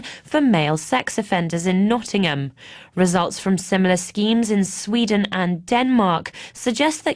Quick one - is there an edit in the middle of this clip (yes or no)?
yes